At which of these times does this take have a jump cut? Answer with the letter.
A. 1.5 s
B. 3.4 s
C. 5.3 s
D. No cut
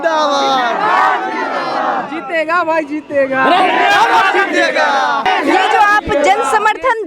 C